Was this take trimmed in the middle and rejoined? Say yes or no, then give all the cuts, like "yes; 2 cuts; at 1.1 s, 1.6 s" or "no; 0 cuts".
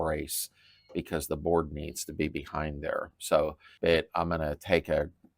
yes; 1 cut; at 3.6 s